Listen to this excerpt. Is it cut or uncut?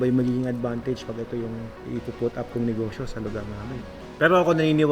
cut